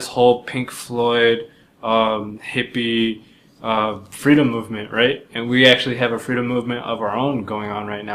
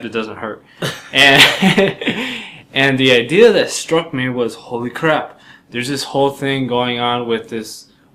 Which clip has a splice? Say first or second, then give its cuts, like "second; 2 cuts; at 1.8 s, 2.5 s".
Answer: second; 1 cut; at 2.3 s